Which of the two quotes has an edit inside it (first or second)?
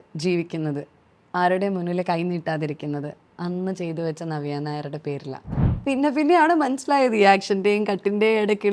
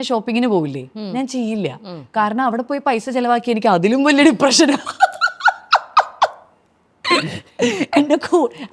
first